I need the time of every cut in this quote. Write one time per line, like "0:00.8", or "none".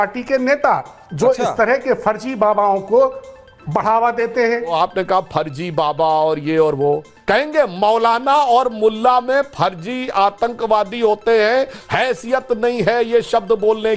0:04.7
0:07.1